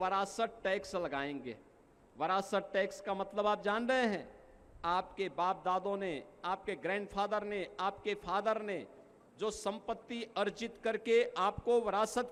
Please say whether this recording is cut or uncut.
uncut